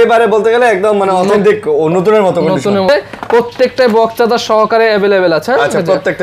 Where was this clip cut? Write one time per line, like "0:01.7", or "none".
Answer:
0:02.9